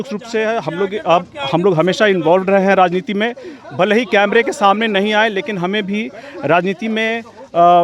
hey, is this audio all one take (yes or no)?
yes